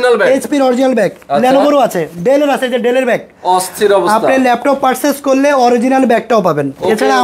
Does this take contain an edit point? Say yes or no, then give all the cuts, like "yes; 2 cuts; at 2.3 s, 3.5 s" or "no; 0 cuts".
no; 0 cuts